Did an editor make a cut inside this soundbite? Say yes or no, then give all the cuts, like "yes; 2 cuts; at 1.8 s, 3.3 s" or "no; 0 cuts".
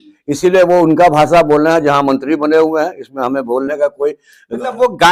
no; 0 cuts